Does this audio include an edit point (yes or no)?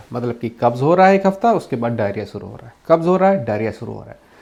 no